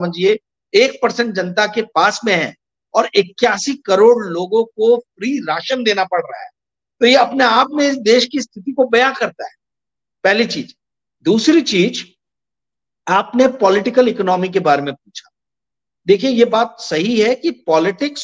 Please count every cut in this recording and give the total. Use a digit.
0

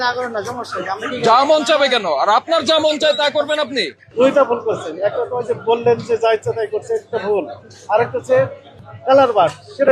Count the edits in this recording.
2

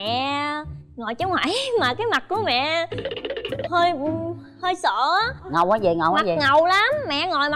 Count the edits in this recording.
0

